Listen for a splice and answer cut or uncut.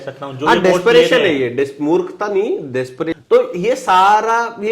cut